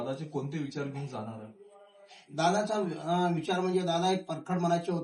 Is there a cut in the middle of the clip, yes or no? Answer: no